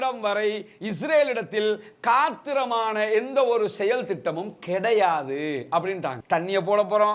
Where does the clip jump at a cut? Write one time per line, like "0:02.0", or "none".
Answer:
none

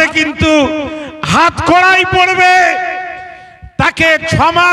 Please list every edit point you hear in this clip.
none

